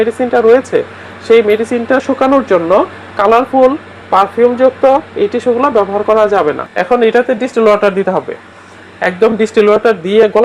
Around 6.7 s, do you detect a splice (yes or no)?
yes